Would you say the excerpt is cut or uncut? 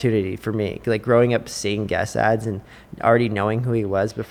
uncut